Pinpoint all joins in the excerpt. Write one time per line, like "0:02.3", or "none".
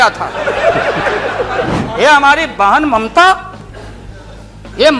0:01.7

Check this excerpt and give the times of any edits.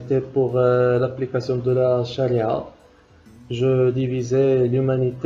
none

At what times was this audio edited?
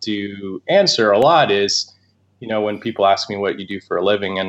none

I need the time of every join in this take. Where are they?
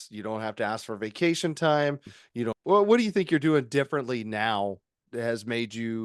0:02.6
0:05.1

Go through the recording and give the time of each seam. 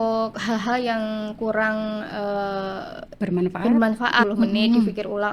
0:04.2

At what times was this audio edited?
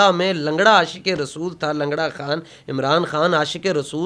none

